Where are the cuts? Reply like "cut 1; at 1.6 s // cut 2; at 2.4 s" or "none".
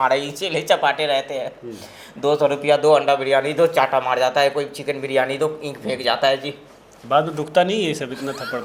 none